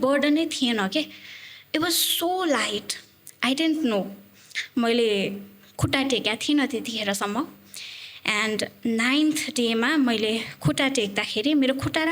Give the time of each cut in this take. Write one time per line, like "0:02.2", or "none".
none